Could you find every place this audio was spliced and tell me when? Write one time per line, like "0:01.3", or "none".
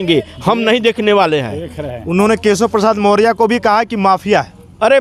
none